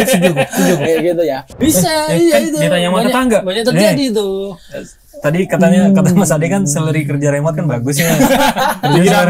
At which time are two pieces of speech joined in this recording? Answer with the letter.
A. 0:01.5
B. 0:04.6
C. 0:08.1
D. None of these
A